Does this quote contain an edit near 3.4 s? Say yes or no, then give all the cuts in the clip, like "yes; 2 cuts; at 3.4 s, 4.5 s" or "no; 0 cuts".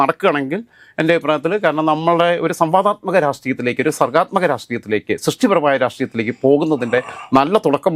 no; 0 cuts